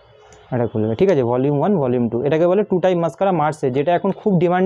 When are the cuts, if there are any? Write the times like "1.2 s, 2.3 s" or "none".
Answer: none